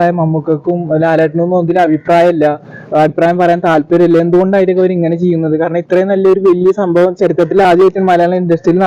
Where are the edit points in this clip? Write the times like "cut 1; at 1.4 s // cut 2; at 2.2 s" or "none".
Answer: none